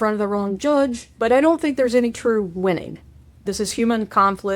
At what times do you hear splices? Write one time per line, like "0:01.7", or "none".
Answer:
0:01.0
0:03.5

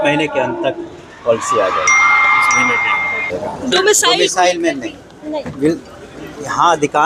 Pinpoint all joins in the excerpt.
0:03.3

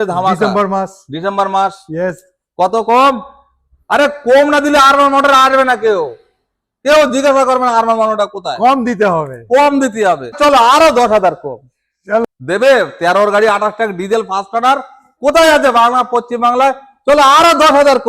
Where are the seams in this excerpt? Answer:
0:10.4
0:12.2

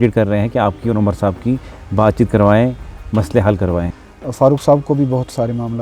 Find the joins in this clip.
0:03.9

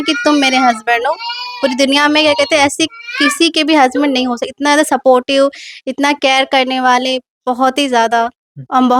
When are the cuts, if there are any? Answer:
none

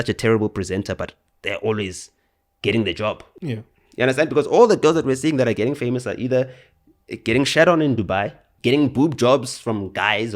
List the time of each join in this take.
0:03.2
0:08.4

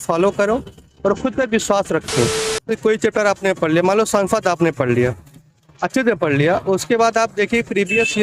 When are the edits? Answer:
0:02.7

